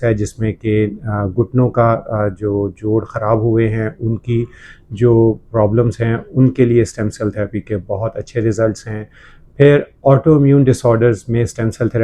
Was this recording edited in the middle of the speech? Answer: no; 0 cuts

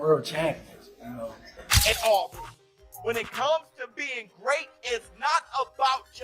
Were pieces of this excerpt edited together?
yes; 1 cut; at 1.7 s

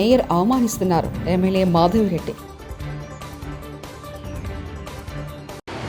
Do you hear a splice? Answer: no; 0 cuts

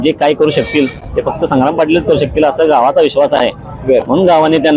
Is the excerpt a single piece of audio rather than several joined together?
yes; 0 cuts

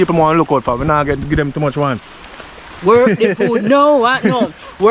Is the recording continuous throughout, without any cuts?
yes; 0 cuts

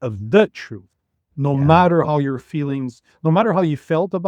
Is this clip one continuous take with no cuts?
yes; 0 cuts

